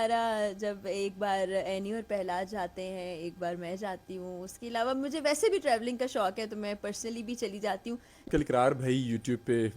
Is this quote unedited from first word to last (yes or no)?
no